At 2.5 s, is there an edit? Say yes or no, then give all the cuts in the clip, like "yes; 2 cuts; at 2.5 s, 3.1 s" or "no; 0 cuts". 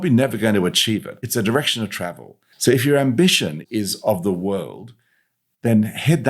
yes; 1 cut; at 2.5 s